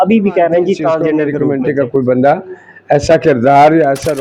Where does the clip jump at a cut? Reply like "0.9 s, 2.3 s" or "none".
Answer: 1.3 s